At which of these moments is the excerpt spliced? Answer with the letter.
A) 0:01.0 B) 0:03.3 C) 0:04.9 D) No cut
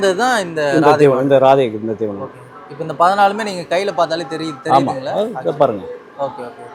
D